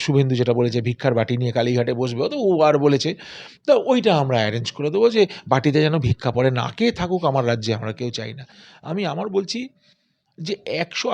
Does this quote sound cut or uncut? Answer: cut